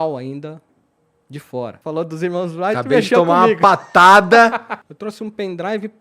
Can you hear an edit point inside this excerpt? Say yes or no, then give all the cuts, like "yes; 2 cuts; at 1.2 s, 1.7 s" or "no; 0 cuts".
yes; 2 cuts; at 1.8 s, 4.8 s